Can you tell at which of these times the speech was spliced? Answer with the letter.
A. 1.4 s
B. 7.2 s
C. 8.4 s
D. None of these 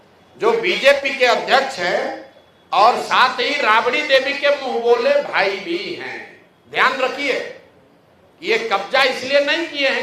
D